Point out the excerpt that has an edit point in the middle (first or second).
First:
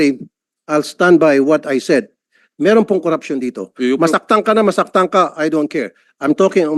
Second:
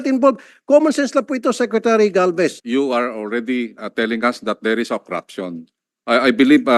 second